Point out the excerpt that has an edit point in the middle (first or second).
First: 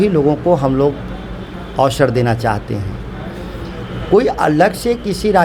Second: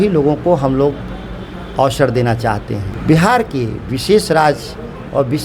second